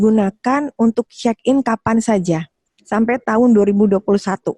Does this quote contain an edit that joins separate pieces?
no; 0 cuts

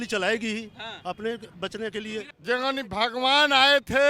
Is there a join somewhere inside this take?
yes; 1 cut; at 2.3 s

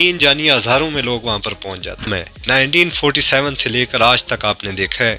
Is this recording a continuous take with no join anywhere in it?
no; 1 cut; at 2.2 s

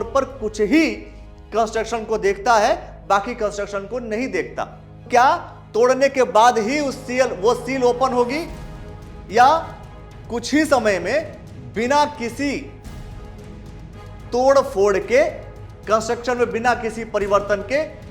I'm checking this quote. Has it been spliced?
yes; 1 cut; at 5.1 s

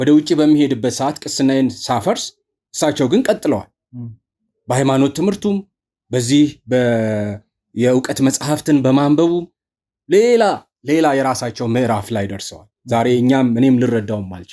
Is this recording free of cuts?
yes; 0 cuts

